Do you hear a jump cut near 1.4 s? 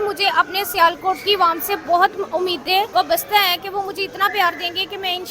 no; 1 cut; at 2.9 s

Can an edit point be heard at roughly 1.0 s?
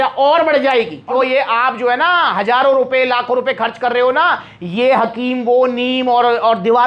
yes; 1 cut; at 1.0 s

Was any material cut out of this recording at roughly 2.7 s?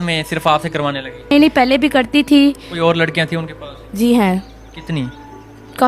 yes; 2 cuts; at 1.3 s, 2.7 s

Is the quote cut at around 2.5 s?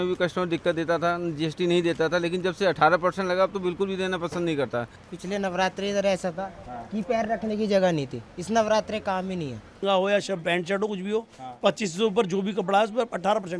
no; 2 cuts; at 5.0 s, 9.8 s

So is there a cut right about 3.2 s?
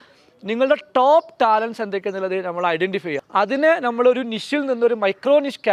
yes; 1 cut; at 3.2 s

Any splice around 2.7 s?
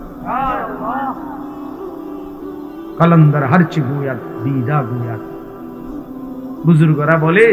yes; 2 cuts; at 1.1 s, 2.7 s

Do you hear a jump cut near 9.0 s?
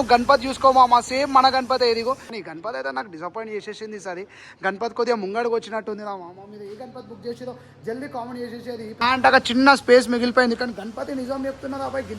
yes; 2 cuts; at 2.3 s, 9.0 s

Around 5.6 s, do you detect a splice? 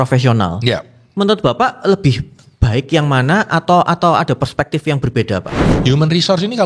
yes; 1 cut; at 5.6 s

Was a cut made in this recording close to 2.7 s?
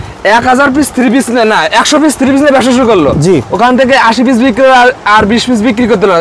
no; 0 cuts

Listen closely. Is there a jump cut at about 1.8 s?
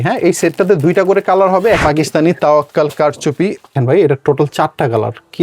yes; 2 cuts; at 1.8 s, 3.7 s

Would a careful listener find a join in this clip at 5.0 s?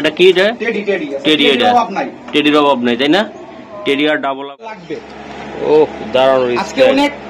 yes; 1 cut; at 5.0 s

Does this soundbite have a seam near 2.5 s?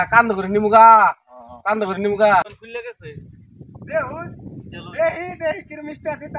yes; 1 cut; at 2.5 s

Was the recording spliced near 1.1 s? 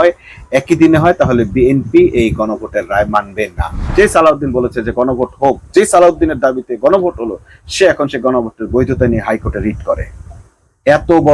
no; 1 cut; at 3.8 s

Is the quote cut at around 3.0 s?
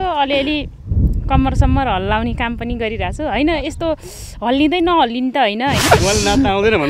no; 1 cut; at 5.8 s

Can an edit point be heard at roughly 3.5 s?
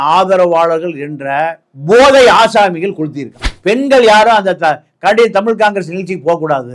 yes; 1 cut; at 3.5 s

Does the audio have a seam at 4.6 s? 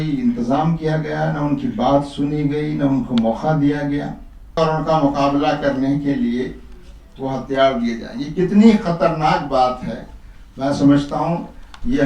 yes; 1 cut; at 4.6 s

